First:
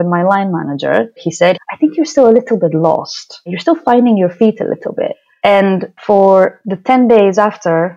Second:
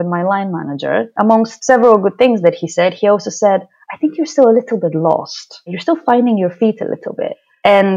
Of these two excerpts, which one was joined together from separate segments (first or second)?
first